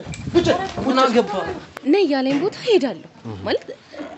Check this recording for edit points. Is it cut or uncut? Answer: cut